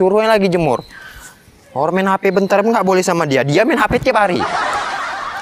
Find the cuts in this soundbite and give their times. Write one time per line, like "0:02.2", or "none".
0:04.4